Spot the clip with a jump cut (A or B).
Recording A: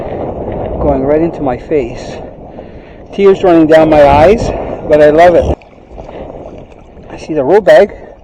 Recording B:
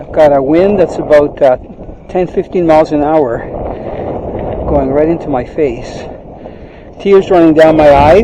A